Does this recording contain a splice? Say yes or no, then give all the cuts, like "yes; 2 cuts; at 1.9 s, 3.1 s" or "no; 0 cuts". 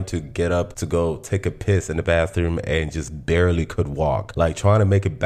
no; 0 cuts